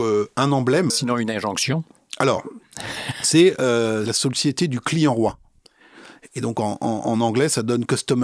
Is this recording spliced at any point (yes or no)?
yes